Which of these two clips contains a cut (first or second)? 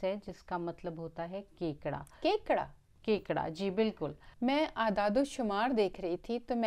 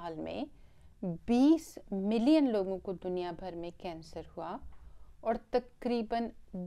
first